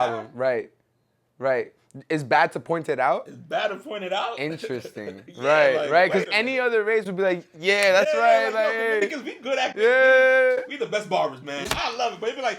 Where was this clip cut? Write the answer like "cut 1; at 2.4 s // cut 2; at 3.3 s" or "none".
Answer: cut 1; at 11.7 s

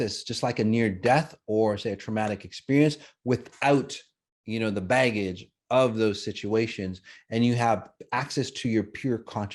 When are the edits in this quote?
none

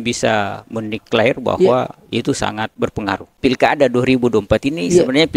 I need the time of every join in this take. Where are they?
cut 1; at 3.2 s

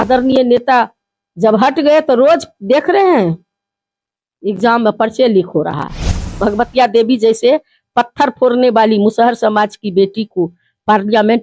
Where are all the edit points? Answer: cut 1; at 6.2 s

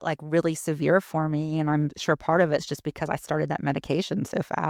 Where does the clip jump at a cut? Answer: none

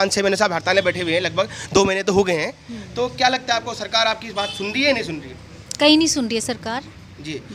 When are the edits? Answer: none

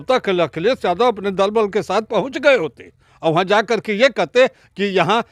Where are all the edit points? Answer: none

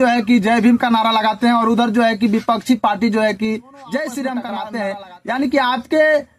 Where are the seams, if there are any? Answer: cut 1; at 4.6 s

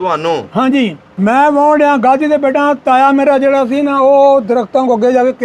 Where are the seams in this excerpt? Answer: cut 1; at 1.0 s

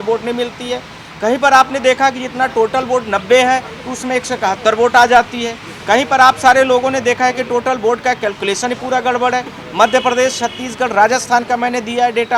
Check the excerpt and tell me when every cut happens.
none

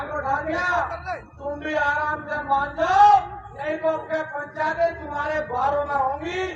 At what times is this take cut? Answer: none

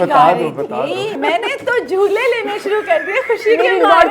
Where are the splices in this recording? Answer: cut 1; at 1.2 s

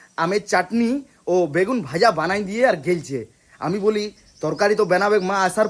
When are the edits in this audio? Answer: none

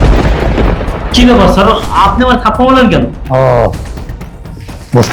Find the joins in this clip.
cut 1; at 1.1 s

